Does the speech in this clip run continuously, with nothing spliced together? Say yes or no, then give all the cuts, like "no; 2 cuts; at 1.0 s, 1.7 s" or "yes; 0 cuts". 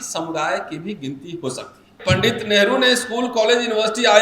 no; 1 cut; at 2.0 s